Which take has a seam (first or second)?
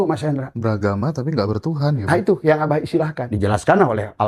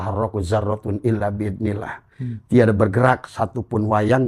first